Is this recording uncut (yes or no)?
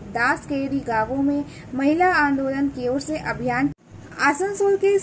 no